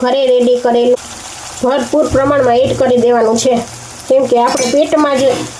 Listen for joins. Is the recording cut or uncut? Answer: cut